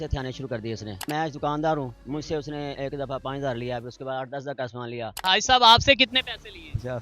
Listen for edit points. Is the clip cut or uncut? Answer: cut